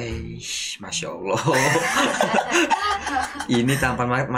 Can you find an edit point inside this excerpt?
no; 0 cuts

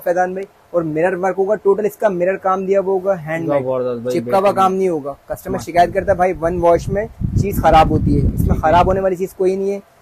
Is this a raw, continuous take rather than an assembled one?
yes; 0 cuts

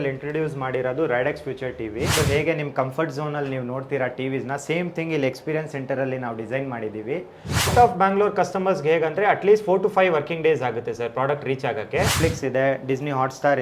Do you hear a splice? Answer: yes; 3 cuts; at 2.1 s, 7.7 s, 12.1 s

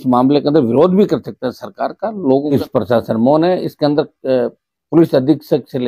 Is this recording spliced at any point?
yes; 1 cut; at 2.5 s

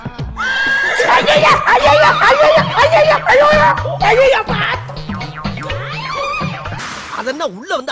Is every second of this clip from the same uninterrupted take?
yes; 0 cuts

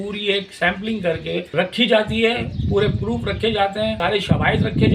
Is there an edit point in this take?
yes; 2 cuts; at 1.5 s, 4.0 s

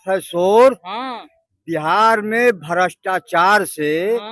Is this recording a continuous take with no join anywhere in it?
yes; 0 cuts

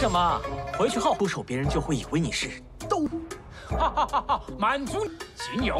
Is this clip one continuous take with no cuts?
no; 1 cut; at 1.2 s

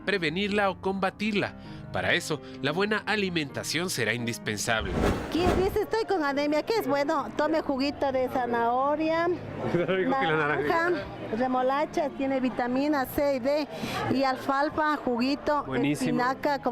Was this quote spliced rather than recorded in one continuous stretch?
yes; 1 cut; at 5.2 s

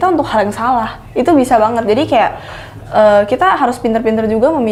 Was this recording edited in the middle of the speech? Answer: no; 0 cuts

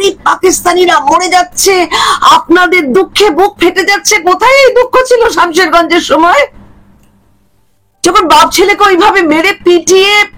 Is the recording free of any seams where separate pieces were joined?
yes; 0 cuts

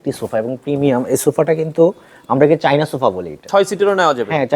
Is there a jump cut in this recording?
yes; 1 cut; at 3.4 s

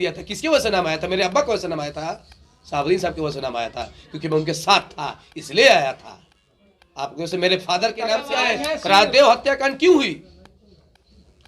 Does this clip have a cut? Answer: yes; 1 cut; at 8.3 s

